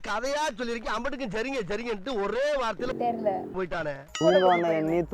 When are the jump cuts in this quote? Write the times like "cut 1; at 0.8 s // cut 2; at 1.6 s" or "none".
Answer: cut 1; at 4.2 s

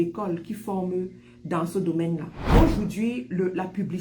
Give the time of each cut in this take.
cut 1; at 2.5 s

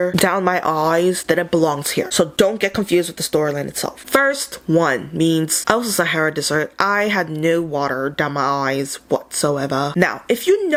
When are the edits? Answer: none

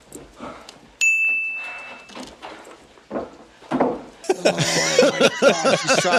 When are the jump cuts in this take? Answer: none

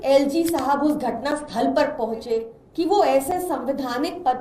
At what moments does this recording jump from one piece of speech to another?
cut 1; at 2.6 s

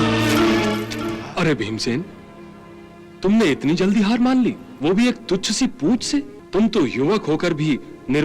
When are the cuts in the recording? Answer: cut 1; at 1.2 s // cut 2; at 4.7 s // cut 3; at 6.4 s

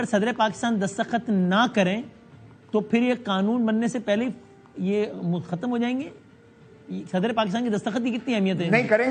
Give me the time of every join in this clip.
none

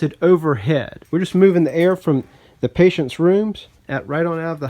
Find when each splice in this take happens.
cut 1; at 1.0 s // cut 2; at 3.7 s

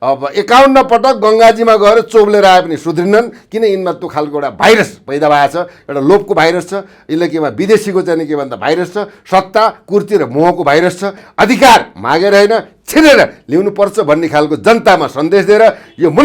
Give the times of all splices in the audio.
cut 1; at 11.2 s

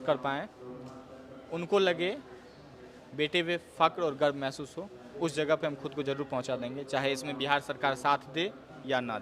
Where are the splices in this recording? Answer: none

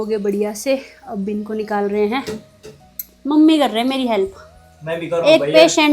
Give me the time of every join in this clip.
none

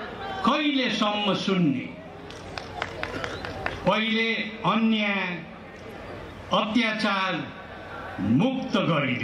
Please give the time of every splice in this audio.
none

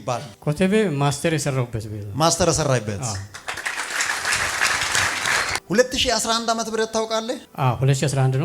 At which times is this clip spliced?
cut 1; at 5.6 s

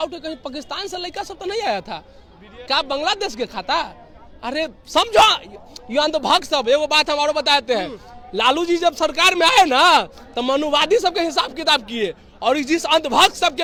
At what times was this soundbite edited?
none

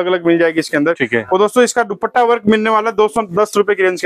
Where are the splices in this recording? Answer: none

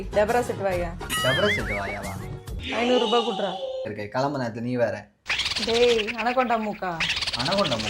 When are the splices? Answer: cut 1; at 3.9 s

